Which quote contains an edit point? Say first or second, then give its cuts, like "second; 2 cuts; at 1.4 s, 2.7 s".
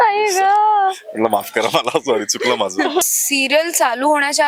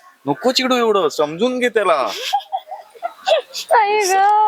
first; 1 cut; at 3.0 s